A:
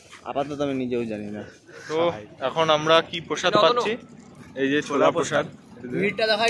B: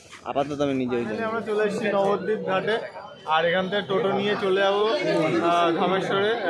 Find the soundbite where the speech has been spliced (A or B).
B